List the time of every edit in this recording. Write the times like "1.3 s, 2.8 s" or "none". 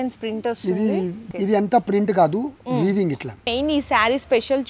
1.2 s, 3.5 s